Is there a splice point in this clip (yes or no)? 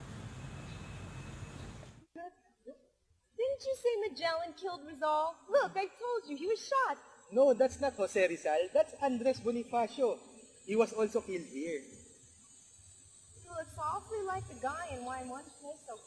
yes